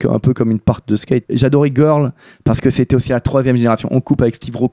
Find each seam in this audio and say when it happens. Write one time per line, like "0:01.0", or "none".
0:01.3
0:03.1